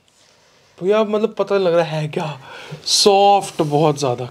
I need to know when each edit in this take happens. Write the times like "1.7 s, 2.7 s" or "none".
none